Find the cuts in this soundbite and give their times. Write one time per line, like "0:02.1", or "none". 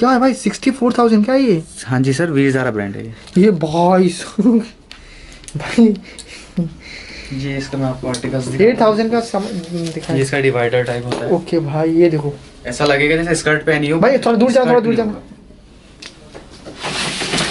none